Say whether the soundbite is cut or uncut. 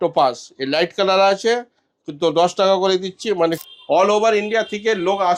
cut